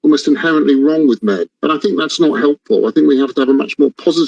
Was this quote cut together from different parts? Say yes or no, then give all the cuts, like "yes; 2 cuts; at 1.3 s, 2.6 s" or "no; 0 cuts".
yes; 1 cut; at 1.5 s